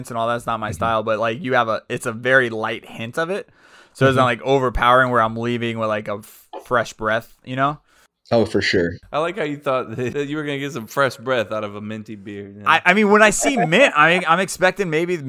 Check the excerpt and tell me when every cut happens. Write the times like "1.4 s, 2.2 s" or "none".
9.0 s, 10.1 s